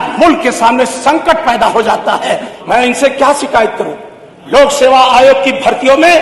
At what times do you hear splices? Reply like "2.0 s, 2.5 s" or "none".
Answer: 2.5 s

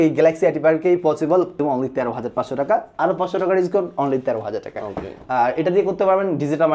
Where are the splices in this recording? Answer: 1.6 s

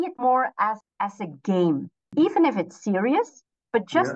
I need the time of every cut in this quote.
0.8 s, 2.0 s

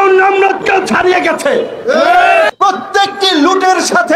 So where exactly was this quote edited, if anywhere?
2.5 s

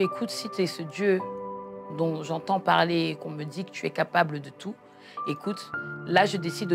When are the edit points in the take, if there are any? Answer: none

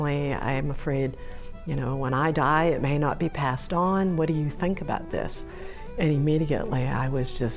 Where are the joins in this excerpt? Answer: none

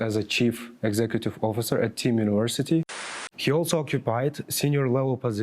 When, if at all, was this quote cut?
2.8 s

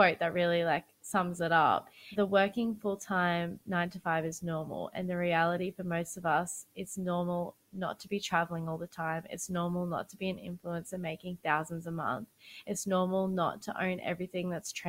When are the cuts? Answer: 0.9 s, 2.0 s

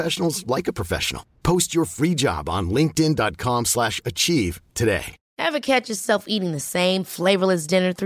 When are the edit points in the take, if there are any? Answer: 5.2 s

